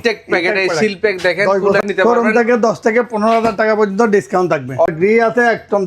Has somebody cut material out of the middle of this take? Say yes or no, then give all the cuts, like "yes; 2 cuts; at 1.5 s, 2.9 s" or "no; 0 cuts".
yes; 2 cuts; at 1.8 s, 4.9 s